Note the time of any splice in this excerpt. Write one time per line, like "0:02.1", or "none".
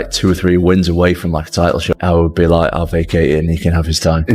0:01.9